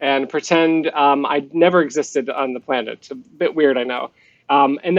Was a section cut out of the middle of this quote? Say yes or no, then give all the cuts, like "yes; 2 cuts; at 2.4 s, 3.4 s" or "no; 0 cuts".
no; 0 cuts